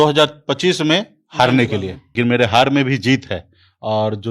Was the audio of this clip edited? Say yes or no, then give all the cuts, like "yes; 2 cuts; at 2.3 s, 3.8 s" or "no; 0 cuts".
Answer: yes; 1 cut; at 2.0 s